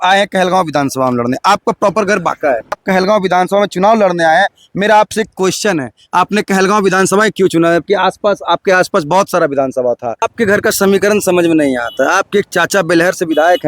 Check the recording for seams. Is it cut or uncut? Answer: cut